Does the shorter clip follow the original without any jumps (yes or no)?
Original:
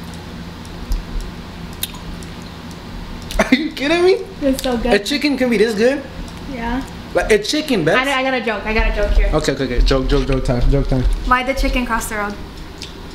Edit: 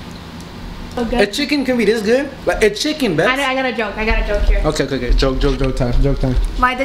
no